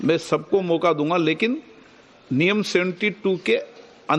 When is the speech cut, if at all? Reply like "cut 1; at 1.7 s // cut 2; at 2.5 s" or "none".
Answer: cut 1; at 2.7 s